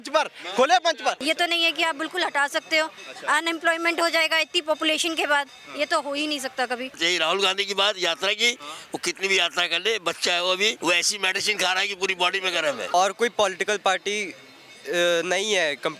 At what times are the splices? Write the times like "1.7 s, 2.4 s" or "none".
1.2 s, 7.0 s, 10.8 s, 12.9 s